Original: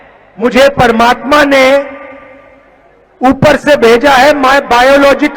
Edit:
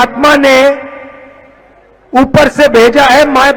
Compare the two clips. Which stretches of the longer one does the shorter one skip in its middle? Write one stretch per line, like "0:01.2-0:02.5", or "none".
none